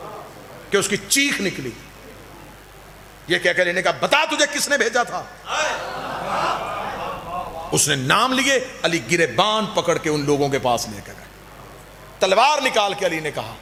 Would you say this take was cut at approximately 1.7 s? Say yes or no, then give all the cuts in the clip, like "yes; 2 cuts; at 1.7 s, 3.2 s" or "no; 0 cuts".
no; 0 cuts